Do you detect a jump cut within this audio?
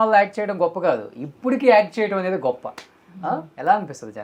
no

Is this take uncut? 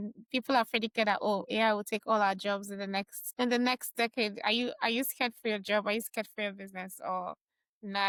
yes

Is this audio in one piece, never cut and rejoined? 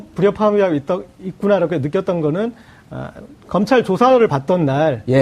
yes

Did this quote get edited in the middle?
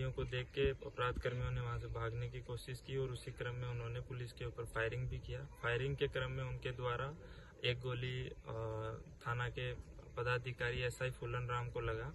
no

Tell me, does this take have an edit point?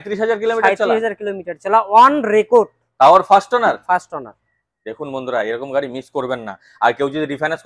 no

